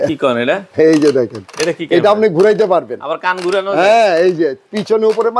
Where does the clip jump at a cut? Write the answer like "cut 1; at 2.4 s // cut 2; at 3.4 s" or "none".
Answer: none